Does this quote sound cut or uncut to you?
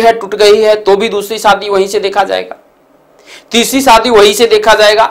uncut